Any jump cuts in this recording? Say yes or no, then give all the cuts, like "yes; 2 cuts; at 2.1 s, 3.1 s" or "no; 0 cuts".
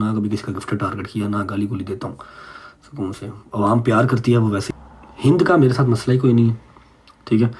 yes; 1 cut; at 4.7 s